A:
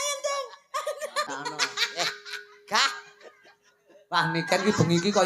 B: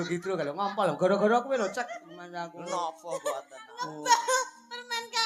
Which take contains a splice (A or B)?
A